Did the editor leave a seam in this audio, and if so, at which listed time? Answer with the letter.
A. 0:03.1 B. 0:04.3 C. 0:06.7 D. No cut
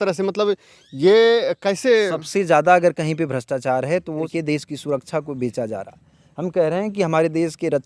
B